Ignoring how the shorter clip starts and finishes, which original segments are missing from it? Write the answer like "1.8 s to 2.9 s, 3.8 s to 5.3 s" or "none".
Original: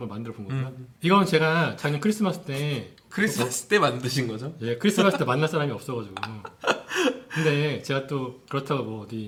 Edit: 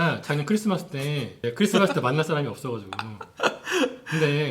2.9 s to 4.6 s

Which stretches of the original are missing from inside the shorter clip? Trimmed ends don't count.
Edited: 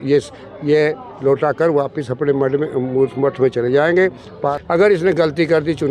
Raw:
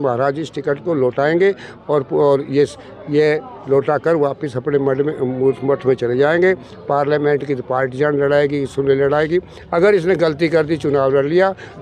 7.0 s to 9.6 s

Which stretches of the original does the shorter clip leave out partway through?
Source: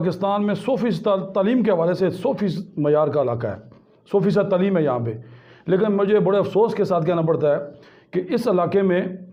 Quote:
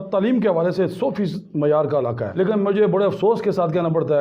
3.5 s to 5.6 s

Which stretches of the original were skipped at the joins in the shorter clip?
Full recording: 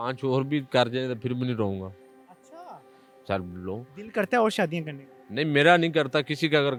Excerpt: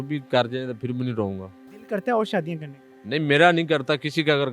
2.1 s to 3.9 s

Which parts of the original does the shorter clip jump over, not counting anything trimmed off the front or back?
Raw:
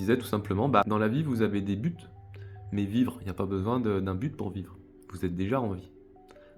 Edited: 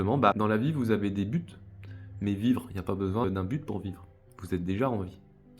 3.8 s to 4.0 s

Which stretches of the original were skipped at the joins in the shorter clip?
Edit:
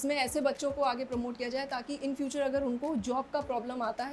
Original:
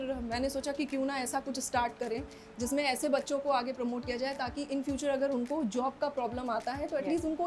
none

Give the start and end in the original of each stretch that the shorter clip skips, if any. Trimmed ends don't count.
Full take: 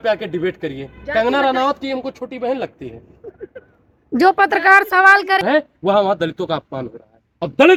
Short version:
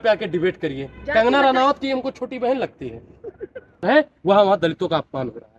3.8 s to 5.4 s

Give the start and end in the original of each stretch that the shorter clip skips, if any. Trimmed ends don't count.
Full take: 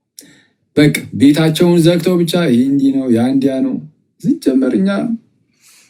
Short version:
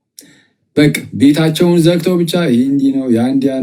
none

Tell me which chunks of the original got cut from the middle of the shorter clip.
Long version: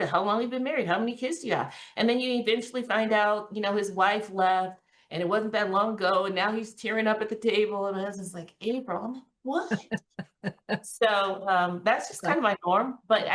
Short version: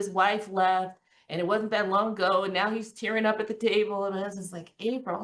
none

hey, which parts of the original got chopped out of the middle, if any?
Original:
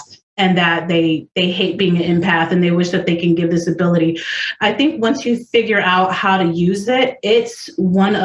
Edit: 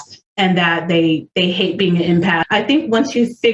2.4 s to 4.5 s

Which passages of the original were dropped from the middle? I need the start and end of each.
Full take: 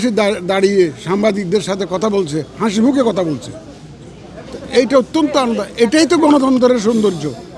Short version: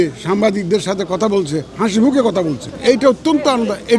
3.5 s to 4.6 s

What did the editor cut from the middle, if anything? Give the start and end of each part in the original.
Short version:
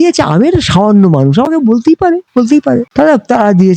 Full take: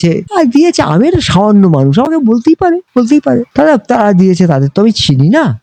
none

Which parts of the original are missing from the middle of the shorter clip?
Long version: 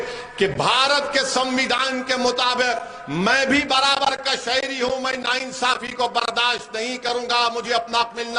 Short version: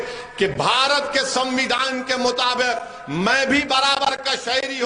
none

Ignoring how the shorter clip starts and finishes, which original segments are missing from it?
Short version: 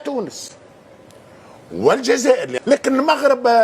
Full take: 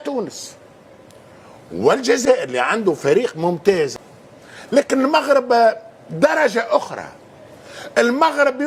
2.5 s to 4.6 s

